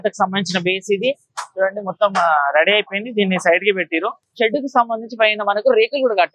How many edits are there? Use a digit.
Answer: 1